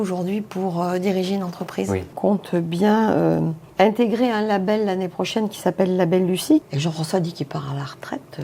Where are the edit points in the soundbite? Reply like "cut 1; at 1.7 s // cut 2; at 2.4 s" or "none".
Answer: cut 1; at 2.1 s // cut 2; at 3.6 s // cut 3; at 6.7 s